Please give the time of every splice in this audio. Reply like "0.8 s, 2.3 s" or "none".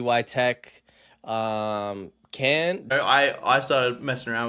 2.9 s

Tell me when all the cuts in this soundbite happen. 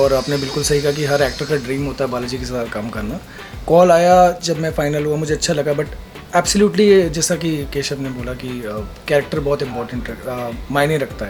none

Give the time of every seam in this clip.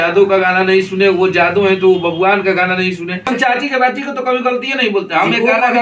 3.3 s

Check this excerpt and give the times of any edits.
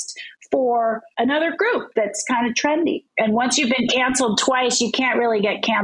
1.1 s, 3.0 s

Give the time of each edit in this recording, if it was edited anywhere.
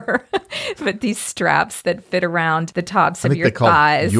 2.8 s

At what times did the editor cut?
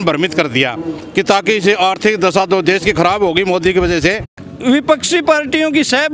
4.4 s

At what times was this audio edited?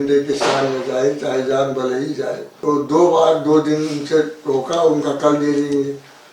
2.5 s

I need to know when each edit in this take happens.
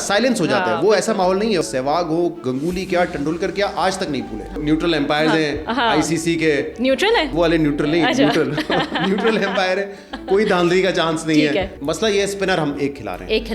1.6 s, 4.6 s, 7.3 s, 11.8 s

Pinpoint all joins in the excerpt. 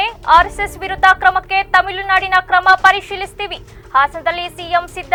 none

